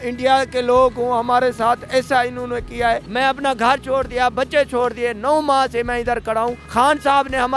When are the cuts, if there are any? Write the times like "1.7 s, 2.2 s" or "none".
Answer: 3.1 s, 6.6 s